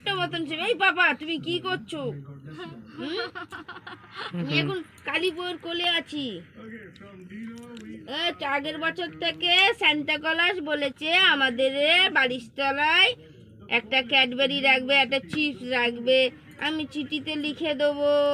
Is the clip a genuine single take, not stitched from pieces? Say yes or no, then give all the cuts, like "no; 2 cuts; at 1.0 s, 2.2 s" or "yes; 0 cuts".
yes; 0 cuts